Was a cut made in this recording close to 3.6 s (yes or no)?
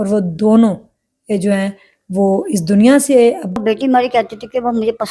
yes